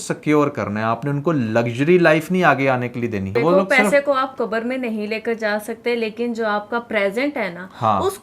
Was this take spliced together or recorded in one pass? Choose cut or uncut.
cut